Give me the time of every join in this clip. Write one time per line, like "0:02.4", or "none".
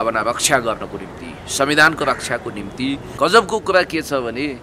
0:03.1